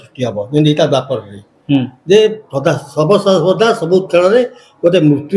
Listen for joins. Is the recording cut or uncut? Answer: uncut